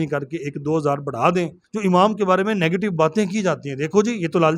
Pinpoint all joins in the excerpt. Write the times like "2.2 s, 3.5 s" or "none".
1.6 s